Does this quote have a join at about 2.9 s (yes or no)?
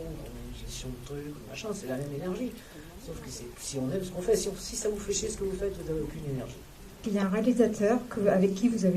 no